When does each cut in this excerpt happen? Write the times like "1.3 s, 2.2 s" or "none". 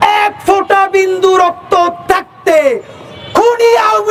none